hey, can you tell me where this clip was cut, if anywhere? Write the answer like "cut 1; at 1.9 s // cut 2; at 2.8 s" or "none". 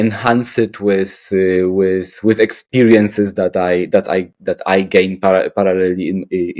none